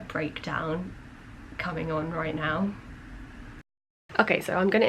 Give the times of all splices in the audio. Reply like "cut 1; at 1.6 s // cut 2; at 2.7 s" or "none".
none